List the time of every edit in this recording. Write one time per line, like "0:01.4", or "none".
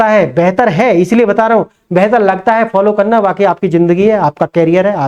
none